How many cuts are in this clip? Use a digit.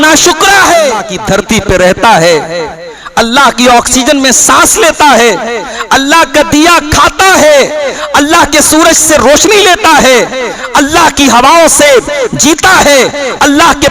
1